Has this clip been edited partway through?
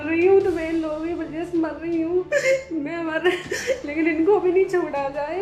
no; 0 cuts

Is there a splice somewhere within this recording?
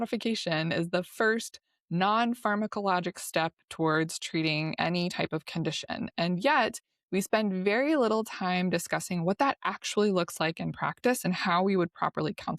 no; 0 cuts

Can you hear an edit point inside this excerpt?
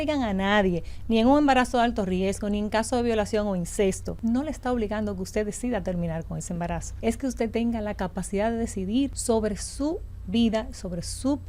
yes; 3 cuts; at 4.1 s, 6.9 s, 9.2 s

